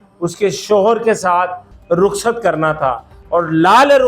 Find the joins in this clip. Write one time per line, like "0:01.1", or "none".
none